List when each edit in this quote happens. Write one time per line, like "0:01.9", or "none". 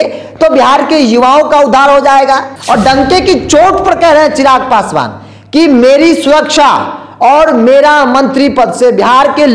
0:02.5